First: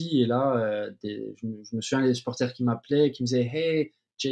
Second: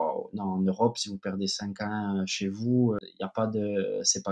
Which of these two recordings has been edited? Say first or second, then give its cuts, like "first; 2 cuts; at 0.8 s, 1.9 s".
second; 1 cut; at 3.0 s